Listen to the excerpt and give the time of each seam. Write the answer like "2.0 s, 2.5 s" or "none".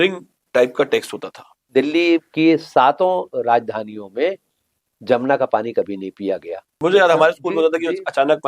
1.5 s, 6.7 s